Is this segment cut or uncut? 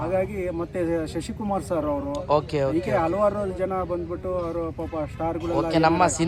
uncut